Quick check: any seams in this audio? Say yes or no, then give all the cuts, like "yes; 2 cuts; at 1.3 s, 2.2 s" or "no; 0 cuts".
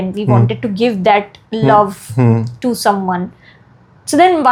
no; 0 cuts